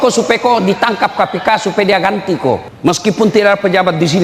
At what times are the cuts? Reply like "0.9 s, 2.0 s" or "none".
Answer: 2.7 s

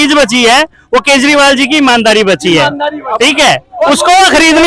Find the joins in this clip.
none

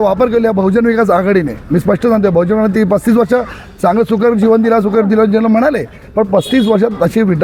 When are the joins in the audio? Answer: none

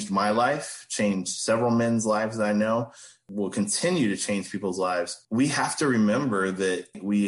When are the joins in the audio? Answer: 5.2 s

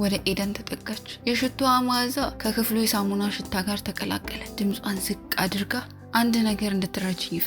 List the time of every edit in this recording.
1.1 s, 2.3 s, 4.4 s, 5.9 s

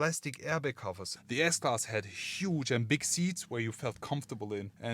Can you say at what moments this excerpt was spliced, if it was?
1.1 s

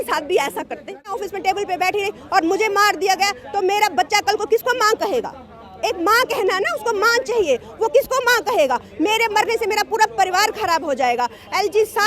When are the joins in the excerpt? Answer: 1.1 s

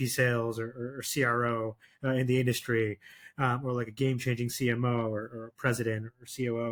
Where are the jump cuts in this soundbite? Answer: none

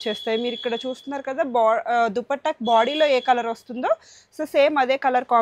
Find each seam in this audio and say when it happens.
none

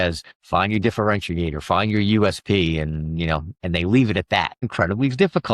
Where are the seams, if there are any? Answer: 4.6 s

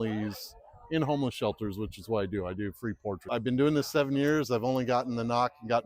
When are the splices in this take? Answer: 3.2 s

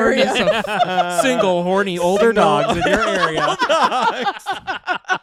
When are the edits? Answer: none

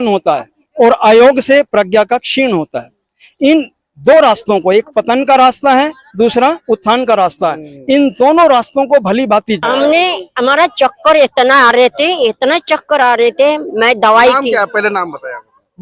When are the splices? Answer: 9.6 s

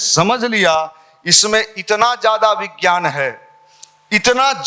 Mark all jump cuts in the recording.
none

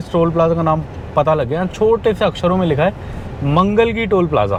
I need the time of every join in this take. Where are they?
none

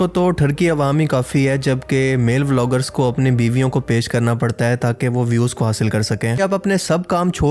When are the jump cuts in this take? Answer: 6.4 s

